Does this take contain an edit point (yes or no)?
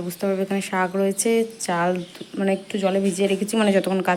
no